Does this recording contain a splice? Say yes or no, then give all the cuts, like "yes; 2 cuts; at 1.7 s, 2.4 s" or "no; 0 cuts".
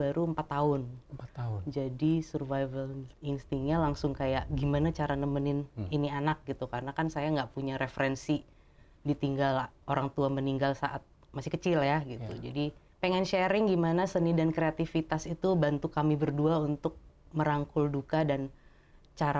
yes; 1 cut; at 12.8 s